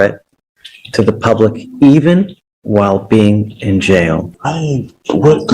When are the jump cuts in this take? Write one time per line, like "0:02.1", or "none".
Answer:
0:04.3